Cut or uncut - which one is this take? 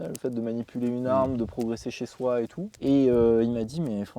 cut